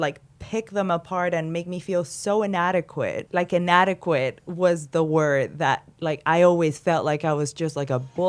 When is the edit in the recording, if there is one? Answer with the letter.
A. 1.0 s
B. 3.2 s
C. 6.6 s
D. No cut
B